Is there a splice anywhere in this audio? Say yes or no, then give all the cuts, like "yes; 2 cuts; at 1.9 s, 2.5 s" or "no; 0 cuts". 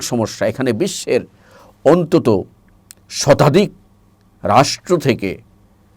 no; 0 cuts